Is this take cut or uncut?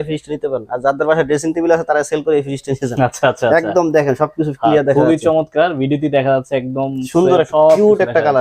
uncut